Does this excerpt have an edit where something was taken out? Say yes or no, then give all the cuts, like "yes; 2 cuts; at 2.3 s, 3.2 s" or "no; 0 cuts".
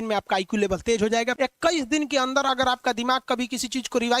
yes; 1 cut; at 1.3 s